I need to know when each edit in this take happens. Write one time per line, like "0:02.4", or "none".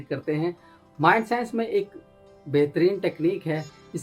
0:01.0